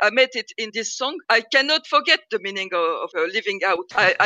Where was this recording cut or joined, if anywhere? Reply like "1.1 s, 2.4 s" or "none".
0.9 s, 1.8 s, 3.3 s